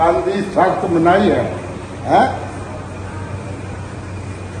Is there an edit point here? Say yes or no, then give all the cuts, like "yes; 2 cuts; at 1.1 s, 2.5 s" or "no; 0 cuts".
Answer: no; 0 cuts